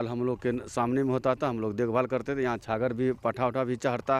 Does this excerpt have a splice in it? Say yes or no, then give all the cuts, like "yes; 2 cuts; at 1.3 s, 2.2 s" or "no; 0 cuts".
no; 0 cuts